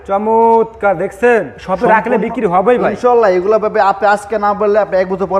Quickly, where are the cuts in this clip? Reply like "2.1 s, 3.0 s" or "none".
1.6 s